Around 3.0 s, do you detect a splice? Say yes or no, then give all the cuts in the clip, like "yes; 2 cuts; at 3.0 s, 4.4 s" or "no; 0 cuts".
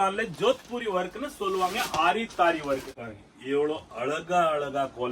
yes; 1 cut; at 3.0 s